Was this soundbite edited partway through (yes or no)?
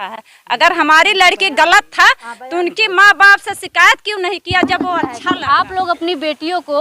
yes